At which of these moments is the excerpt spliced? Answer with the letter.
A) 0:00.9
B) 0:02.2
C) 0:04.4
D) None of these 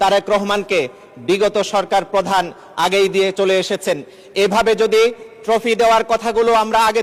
D